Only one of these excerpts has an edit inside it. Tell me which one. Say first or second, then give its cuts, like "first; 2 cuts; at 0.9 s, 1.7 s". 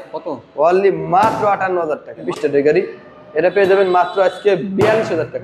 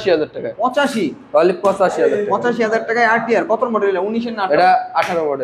first; 1 cut; at 2.3 s